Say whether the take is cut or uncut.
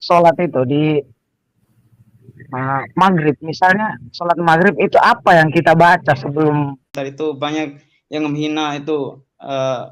cut